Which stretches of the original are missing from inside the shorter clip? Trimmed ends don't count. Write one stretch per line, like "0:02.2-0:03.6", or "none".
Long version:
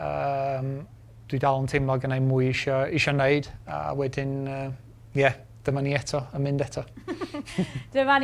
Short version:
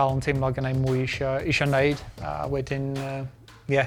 none